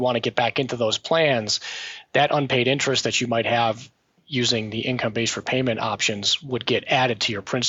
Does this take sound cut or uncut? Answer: uncut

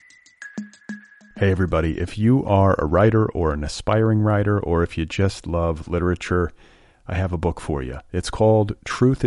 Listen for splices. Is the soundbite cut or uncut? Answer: cut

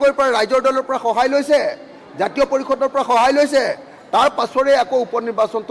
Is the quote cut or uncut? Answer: uncut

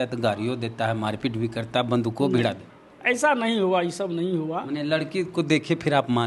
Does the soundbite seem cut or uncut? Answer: uncut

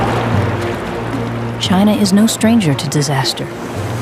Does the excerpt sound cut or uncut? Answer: cut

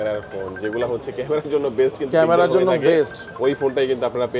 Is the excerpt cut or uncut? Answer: uncut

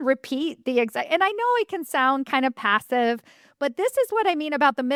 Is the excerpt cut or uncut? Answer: uncut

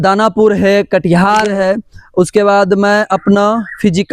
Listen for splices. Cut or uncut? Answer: cut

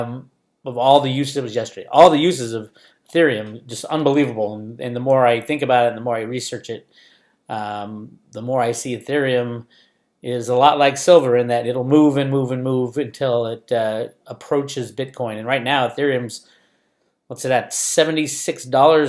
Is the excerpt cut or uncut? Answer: cut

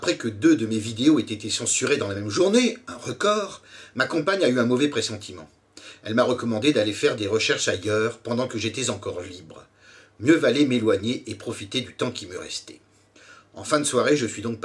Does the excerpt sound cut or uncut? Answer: uncut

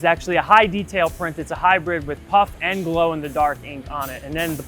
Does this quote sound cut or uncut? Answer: uncut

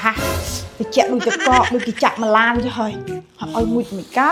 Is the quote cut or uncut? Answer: uncut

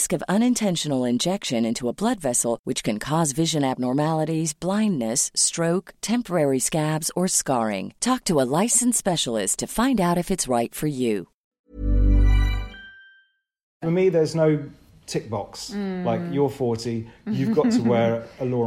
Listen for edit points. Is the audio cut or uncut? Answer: cut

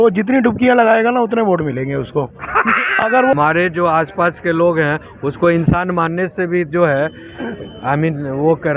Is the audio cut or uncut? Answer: cut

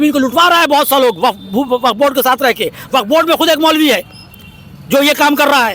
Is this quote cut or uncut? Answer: uncut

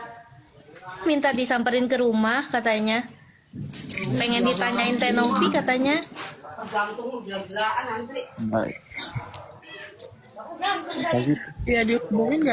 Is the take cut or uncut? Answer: uncut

